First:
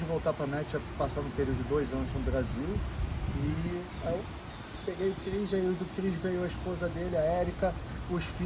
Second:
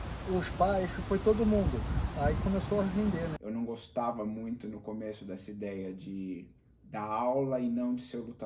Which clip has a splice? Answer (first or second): second